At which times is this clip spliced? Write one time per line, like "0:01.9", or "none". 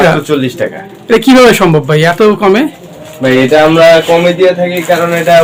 none